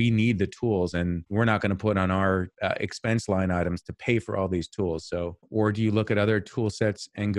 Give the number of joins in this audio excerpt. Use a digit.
1